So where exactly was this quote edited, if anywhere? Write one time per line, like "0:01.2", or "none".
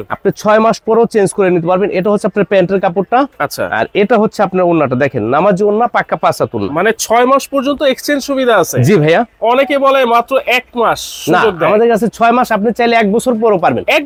none